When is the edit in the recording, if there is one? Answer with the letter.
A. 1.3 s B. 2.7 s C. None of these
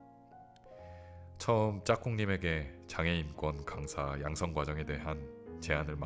A